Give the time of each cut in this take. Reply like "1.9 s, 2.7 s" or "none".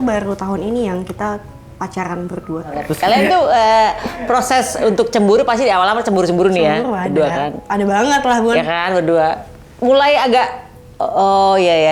2.9 s